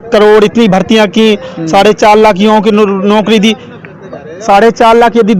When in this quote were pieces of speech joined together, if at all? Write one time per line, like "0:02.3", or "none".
none